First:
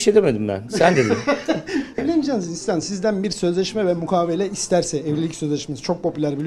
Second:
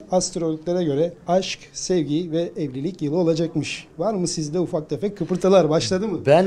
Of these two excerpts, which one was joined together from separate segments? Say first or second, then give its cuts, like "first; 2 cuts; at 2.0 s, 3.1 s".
first; 1 cut; at 1.9 s